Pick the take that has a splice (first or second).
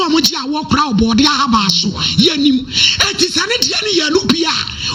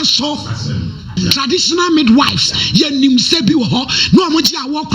second